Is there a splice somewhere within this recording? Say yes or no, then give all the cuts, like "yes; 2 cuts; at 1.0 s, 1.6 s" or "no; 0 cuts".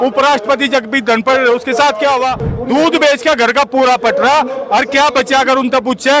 yes; 1 cut; at 2.5 s